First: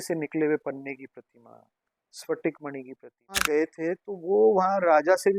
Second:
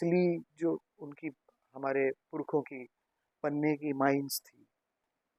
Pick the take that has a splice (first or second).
first